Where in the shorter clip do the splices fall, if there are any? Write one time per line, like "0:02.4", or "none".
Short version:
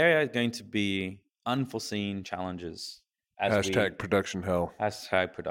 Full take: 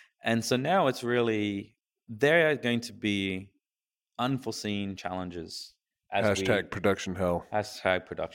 0:01.3